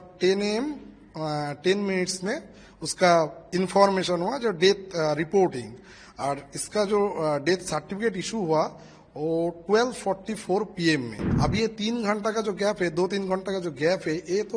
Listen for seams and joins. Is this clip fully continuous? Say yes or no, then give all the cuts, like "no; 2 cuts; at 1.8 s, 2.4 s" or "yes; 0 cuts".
no; 1 cut; at 11.2 s